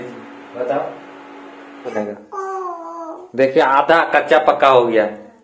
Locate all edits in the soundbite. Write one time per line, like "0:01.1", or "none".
0:01.9